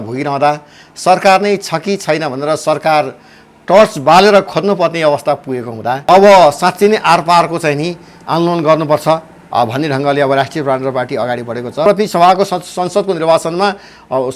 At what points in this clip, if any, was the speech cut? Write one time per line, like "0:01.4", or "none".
0:06.0
0:11.8